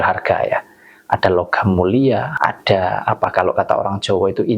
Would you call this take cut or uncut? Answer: cut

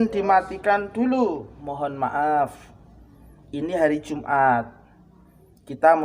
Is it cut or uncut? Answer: cut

